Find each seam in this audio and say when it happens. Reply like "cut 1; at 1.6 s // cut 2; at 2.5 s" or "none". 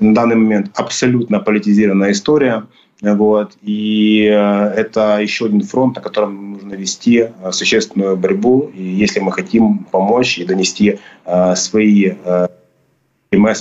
none